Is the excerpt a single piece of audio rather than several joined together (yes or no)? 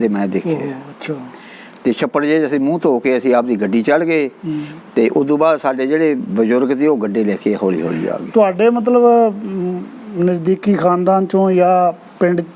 yes